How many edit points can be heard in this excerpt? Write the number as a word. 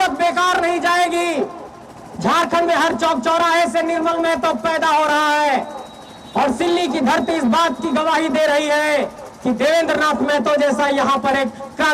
zero